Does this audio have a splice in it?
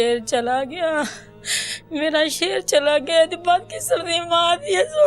yes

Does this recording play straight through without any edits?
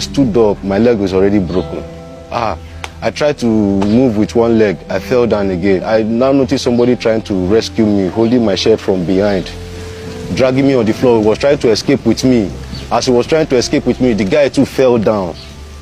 yes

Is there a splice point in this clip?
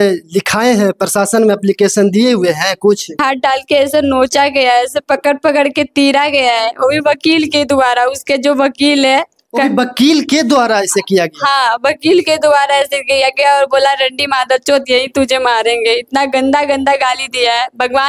yes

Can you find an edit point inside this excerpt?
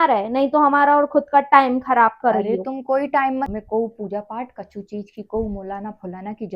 yes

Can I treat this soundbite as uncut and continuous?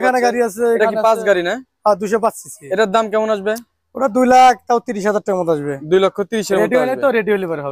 yes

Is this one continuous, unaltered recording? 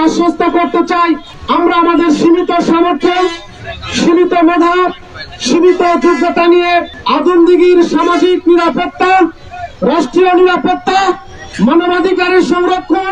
no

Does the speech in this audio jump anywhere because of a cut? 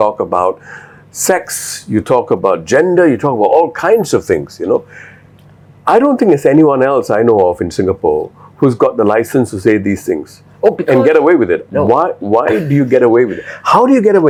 no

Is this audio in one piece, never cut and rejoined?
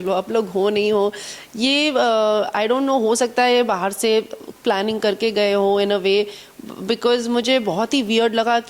yes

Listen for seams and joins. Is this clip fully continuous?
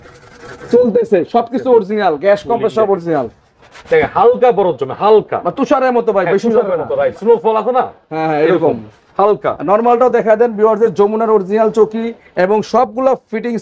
yes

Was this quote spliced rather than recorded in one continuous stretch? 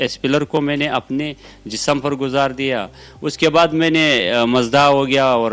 no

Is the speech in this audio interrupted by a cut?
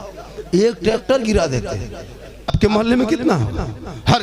yes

